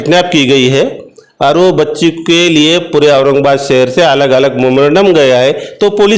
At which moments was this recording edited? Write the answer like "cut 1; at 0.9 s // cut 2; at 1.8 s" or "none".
none